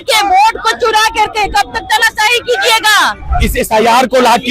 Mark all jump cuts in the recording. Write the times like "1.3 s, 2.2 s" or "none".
3.2 s